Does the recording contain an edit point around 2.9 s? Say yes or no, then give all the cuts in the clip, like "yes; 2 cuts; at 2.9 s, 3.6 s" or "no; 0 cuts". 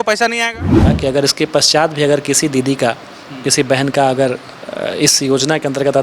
no; 1 cut; at 0.9 s